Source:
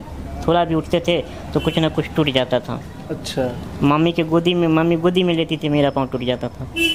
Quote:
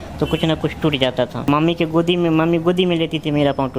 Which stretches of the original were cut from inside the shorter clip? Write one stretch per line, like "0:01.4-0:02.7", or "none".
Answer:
0:02.8-0:03.9